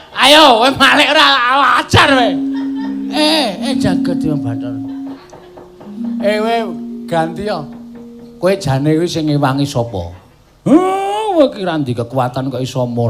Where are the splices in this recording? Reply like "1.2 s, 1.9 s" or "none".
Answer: 5.2 s